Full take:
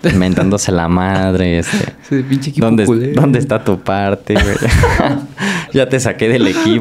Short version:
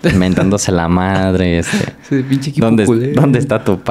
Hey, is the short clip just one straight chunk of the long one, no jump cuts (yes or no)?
yes